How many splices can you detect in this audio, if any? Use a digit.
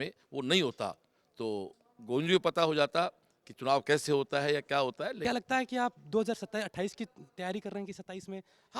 1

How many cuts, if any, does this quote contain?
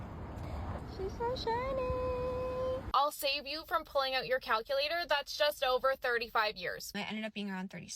2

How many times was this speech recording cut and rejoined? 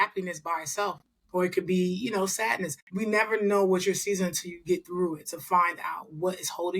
1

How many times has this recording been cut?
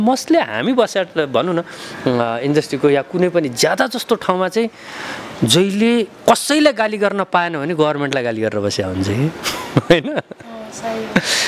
0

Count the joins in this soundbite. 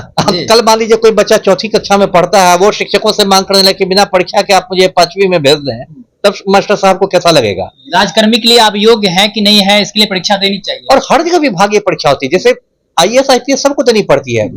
0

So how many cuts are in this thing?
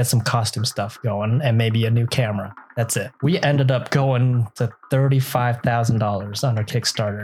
1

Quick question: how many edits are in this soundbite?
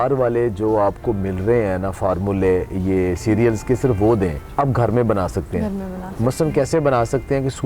1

